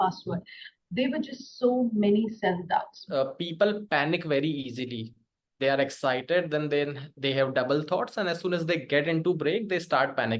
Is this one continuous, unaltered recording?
no; 1 cut; at 3.0 s

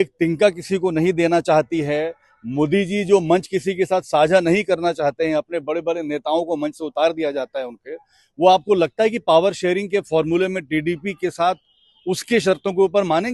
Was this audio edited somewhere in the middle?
no; 0 cuts

